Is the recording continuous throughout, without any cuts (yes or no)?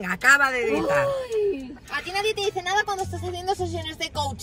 yes